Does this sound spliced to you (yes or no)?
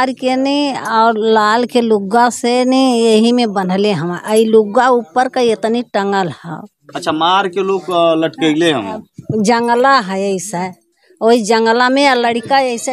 no